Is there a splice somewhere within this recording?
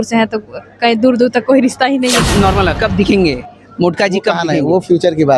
yes; 1 cut; at 2.2 s

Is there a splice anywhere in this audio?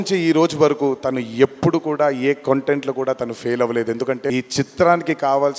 yes; 1 cut; at 4.3 s

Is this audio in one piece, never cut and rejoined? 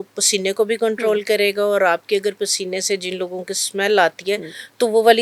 yes; 0 cuts

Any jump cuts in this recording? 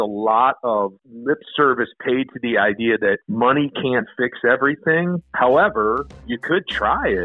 yes; 4 cuts; at 1.1 s, 3.3 s, 5.2 s, 6.3 s

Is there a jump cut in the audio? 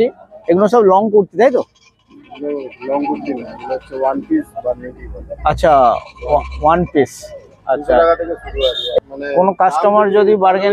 yes; 1 cut; at 9.0 s

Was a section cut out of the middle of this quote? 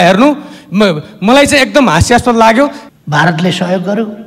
yes; 1 cut; at 2.8 s

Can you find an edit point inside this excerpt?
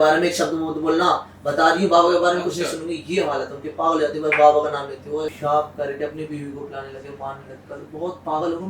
yes; 1 cut; at 5.3 s

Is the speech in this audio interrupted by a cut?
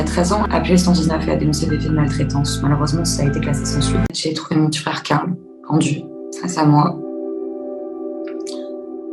no; 0 cuts

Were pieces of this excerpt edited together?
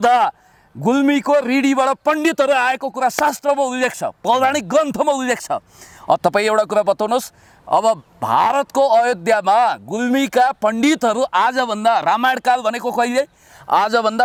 no; 0 cuts

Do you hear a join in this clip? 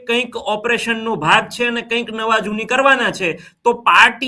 no; 0 cuts

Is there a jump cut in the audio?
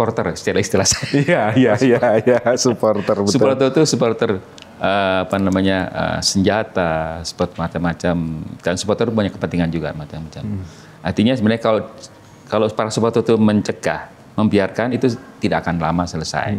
no; 0 cuts

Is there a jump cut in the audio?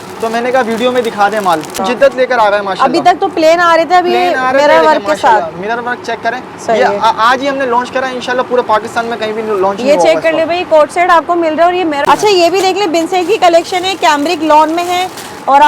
yes; 2 cuts; at 1.8 s, 12.0 s

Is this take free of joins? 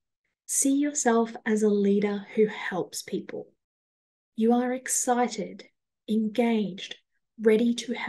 yes; 0 cuts

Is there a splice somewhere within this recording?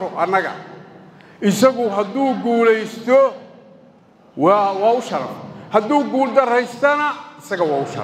no; 0 cuts

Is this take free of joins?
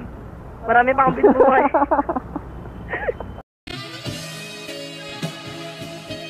yes; 0 cuts

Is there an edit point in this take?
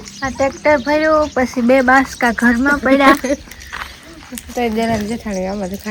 no; 0 cuts

